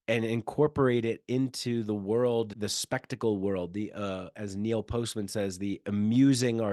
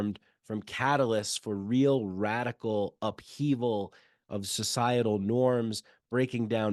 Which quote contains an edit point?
first; 1 cut; at 2.5 s

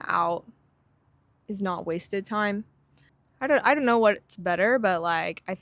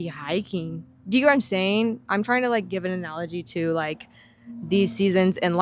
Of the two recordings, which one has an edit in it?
first; 1 cut; at 3.3 s

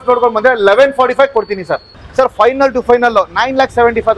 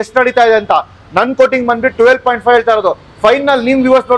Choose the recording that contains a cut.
first; 1 cut; at 2.0 s

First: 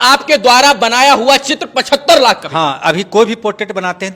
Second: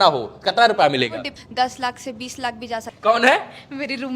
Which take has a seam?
second; 2 cuts; at 1.3 s, 2.9 s

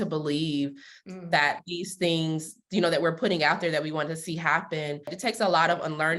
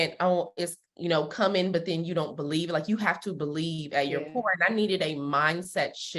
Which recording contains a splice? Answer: first; 1 cut; at 5.1 s

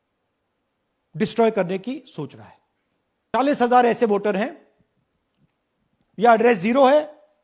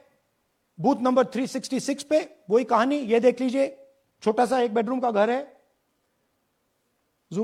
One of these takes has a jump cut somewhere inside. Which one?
first; 1 cut; at 3.3 s

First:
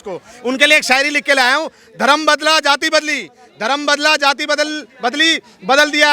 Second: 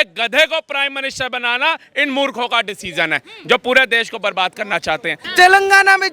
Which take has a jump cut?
second; 1 cut; at 5.2 s

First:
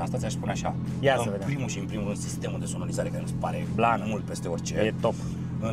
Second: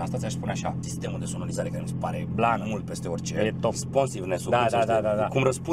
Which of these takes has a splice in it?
second; 2 cuts; at 0.8 s, 3.8 s

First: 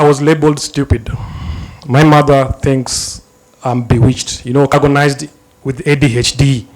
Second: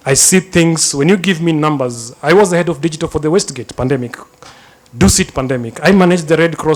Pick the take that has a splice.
first; 1 cut; at 4.7 s

